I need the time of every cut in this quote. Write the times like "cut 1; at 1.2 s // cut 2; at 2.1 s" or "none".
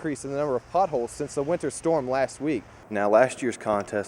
cut 1; at 2.8 s